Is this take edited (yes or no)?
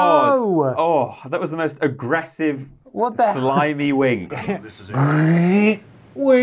yes